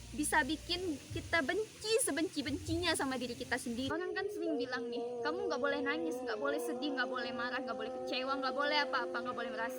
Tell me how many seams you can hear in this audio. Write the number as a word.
one